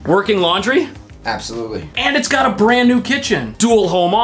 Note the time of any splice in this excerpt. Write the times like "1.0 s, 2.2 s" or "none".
none